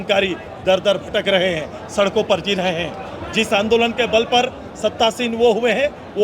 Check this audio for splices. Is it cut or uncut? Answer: uncut